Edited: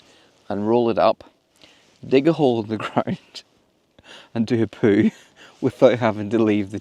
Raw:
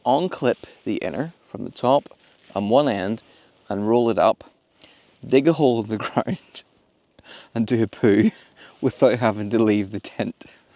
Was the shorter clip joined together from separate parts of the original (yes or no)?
no